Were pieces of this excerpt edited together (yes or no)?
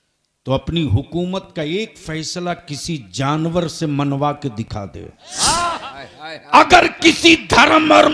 yes